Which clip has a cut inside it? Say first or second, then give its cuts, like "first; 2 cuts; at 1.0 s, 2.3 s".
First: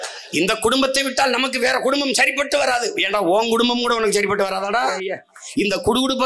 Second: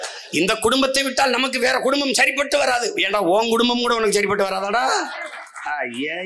first; 1 cut; at 4.9 s